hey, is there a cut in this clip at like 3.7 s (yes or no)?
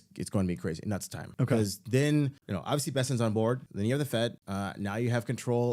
yes